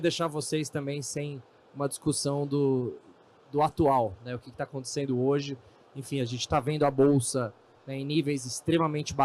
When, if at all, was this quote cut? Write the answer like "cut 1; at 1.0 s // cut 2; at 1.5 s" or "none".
none